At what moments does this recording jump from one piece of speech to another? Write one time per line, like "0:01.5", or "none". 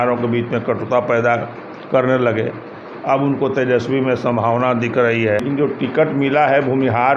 0:05.4